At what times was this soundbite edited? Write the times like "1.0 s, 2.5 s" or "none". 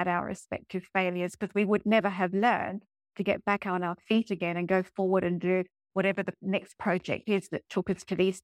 none

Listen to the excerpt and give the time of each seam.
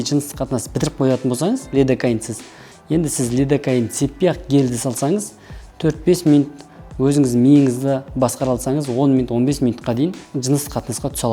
10.2 s

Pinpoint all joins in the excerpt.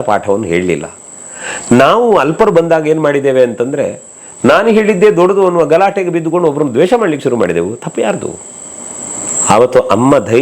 9.2 s

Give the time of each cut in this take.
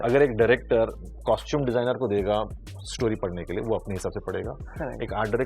1.2 s

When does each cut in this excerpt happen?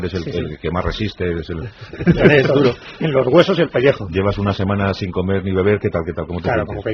none

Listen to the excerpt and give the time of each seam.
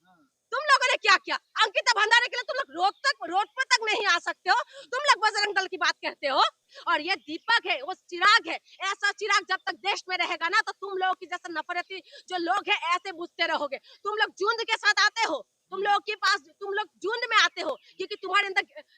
6.7 s

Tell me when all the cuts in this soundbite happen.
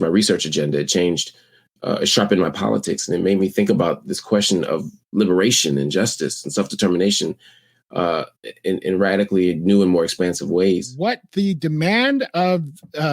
10.9 s

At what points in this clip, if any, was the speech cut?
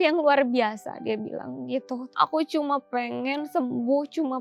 2.1 s

